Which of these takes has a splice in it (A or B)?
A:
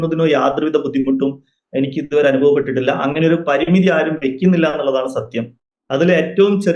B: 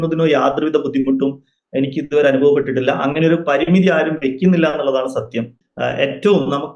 B